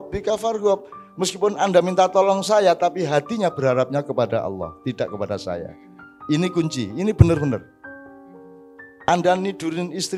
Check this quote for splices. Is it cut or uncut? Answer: uncut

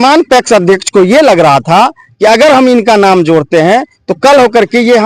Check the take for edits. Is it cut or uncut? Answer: uncut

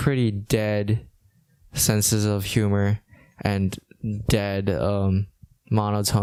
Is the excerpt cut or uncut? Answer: uncut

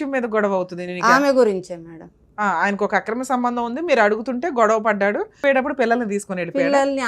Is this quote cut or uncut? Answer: cut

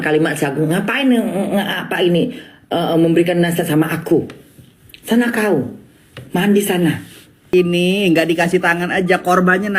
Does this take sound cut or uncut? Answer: cut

